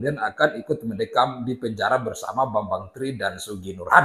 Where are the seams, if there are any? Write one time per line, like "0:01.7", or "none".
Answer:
none